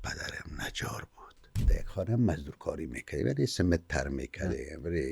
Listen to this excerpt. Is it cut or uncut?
cut